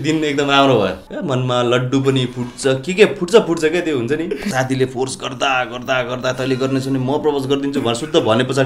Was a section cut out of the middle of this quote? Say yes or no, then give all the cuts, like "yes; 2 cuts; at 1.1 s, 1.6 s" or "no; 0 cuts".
yes; 2 cuts; at 1.0 s, 4.5 s